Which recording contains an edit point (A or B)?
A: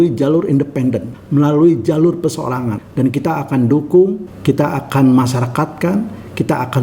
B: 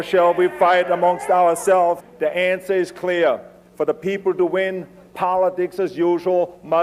A